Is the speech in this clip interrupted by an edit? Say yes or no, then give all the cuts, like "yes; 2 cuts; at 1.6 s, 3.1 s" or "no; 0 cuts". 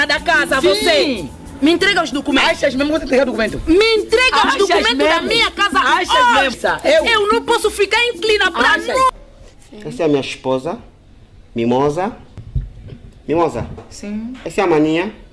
yes; 1 cut; at 9.2 s